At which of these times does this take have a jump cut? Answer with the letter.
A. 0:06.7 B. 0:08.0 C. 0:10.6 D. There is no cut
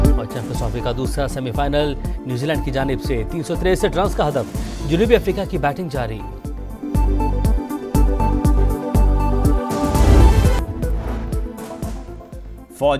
C